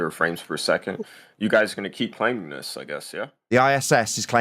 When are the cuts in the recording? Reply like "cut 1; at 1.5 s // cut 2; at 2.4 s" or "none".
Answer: cut 1; at 3.0 s